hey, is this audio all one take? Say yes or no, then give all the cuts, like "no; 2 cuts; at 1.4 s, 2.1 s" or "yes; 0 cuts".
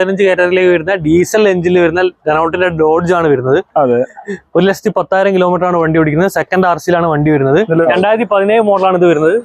no; 1 cut; at 7.8 s